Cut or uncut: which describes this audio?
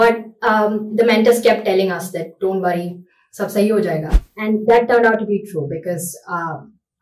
cut